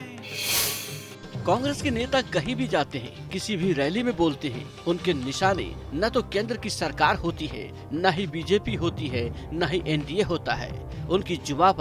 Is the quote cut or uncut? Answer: uncut